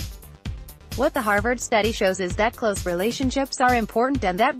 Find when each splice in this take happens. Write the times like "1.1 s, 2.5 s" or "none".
1.0 s